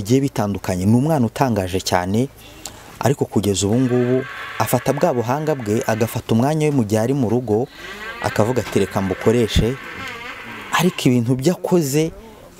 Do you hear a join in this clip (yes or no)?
no